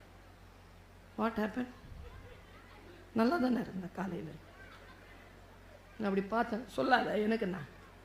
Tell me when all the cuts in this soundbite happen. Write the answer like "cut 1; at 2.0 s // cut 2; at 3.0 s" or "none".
none